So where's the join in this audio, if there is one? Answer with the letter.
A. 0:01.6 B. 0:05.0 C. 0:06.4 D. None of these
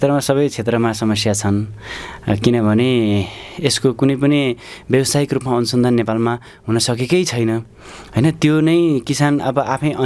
D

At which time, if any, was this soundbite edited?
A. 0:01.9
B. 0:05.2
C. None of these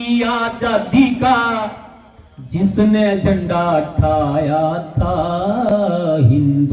C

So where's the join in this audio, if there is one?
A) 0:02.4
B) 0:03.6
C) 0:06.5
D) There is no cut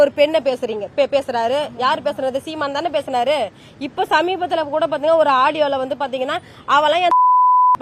D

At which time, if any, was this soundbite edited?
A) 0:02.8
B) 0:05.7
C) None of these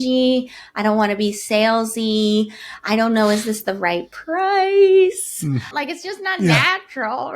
B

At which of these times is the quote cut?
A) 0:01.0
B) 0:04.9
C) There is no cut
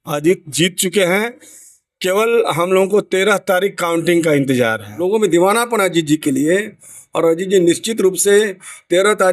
B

